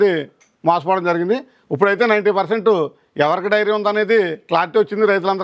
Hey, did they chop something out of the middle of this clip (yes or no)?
no